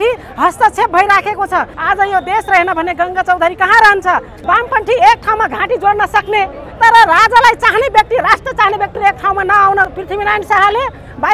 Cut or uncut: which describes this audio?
cut